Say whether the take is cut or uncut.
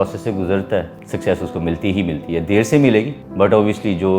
cut